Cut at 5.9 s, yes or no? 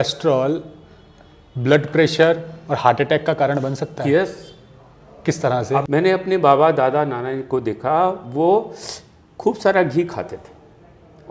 yes